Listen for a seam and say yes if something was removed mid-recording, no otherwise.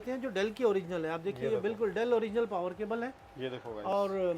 no